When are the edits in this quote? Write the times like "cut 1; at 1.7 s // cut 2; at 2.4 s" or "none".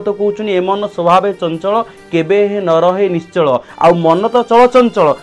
none